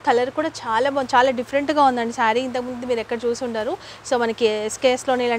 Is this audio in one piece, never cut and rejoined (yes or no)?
yes